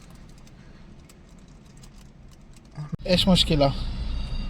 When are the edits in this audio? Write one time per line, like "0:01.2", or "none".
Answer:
0:02.9